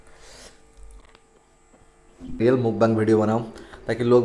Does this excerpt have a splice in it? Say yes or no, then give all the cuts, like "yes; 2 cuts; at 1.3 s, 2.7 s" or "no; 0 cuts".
yes; 1 cut; at 2.4 s